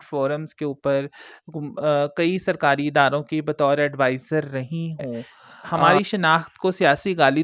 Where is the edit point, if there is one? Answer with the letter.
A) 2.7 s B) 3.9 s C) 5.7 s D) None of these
C